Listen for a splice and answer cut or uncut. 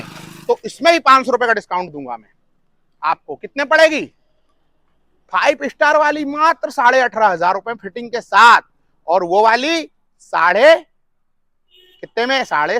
uncut